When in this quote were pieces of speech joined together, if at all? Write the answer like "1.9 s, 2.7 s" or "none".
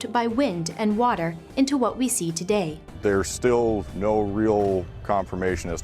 2.9 s